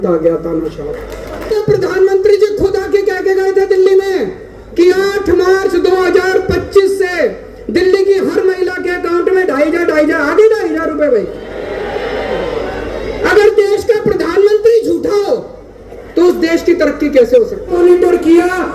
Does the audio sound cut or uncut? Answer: cut